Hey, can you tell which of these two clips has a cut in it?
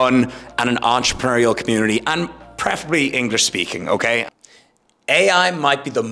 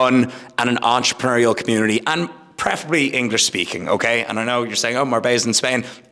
first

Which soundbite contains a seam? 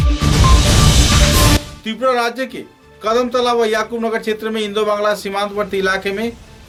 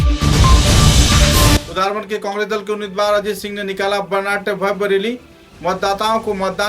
second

